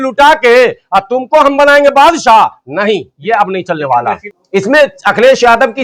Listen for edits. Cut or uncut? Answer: cut